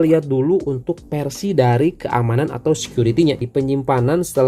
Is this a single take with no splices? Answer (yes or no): no